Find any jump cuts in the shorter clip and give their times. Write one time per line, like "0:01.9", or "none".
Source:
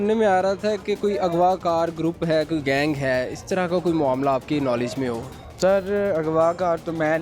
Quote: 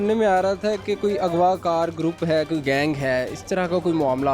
none